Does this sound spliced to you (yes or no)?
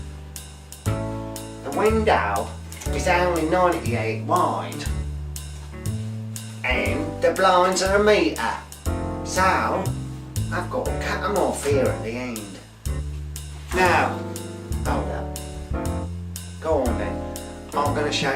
yes